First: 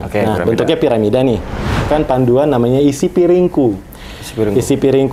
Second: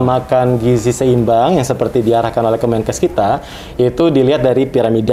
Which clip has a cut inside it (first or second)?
first